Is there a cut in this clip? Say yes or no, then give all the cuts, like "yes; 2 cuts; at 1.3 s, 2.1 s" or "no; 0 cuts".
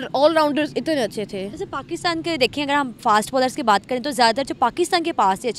no; 0 cuts